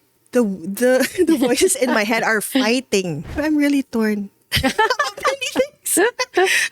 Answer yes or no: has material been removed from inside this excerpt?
yes